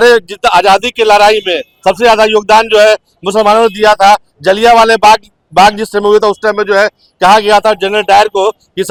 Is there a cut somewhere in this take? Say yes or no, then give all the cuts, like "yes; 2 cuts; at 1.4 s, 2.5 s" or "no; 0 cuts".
no; 0 cuts